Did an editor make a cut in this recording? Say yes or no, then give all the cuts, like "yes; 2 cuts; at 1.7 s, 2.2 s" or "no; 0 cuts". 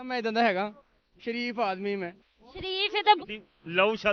yes; 1 cut; at 3.2 s